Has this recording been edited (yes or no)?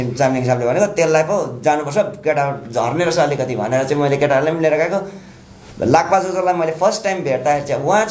no